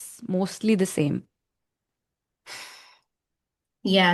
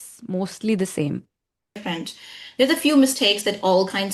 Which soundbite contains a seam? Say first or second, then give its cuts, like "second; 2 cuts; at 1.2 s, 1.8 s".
second; 1 cut; at 1.8 s